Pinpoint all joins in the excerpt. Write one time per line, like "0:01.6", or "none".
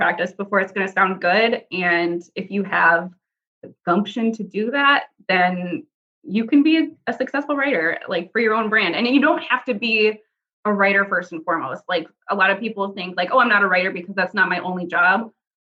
none